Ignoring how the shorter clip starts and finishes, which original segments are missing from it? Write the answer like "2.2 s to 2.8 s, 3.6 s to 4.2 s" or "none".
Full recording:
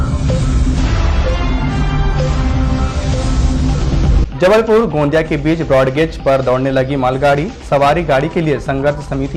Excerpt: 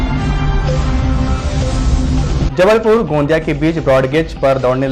4.0 s to 4.3 s